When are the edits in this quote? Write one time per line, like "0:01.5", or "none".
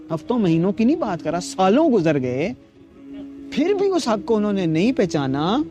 none